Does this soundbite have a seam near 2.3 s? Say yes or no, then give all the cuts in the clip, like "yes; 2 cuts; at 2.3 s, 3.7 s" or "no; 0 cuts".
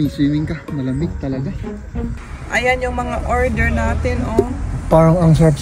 yes; 1 cut; at 2.3 s